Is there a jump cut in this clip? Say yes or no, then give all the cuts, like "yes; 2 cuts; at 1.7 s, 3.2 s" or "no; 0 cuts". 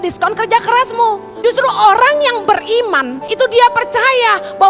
yes; 2 cuts; at 1.3 s, 3.2 s